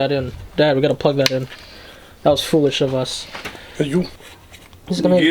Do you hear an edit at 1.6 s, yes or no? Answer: no